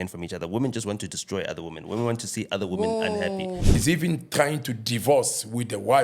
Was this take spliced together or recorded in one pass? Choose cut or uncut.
cut